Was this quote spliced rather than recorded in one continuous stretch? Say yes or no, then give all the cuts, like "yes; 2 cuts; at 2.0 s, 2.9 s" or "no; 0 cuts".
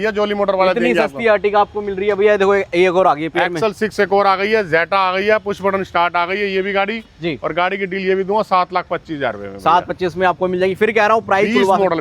no; 0 cuts